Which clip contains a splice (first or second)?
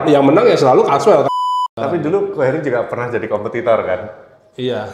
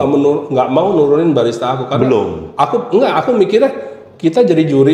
first